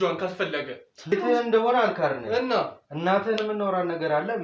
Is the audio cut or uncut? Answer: cut